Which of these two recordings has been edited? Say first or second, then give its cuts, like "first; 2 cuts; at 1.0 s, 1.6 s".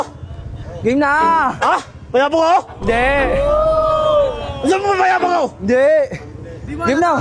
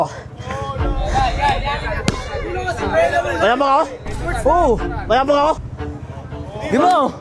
second; 1 cut; at 5.6 s